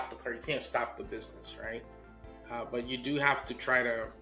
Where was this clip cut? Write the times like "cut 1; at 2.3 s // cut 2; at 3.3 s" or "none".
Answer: none